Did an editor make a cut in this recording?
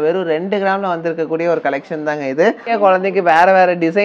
yes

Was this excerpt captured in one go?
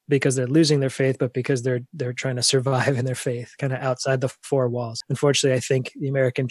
no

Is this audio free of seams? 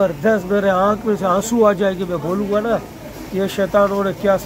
yes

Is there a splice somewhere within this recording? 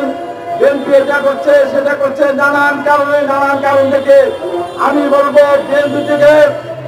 no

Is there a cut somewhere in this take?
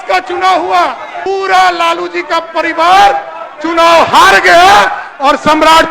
yes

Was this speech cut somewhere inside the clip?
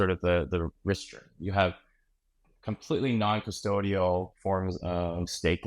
no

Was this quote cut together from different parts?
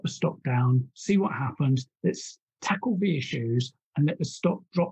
no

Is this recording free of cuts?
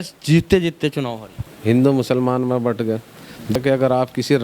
no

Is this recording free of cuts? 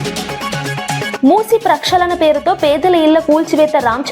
yes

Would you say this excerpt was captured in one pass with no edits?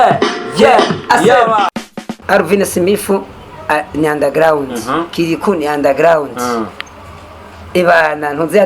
no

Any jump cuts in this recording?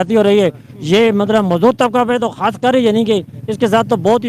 no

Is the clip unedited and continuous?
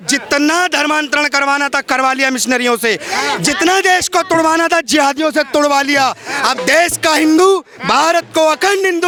yes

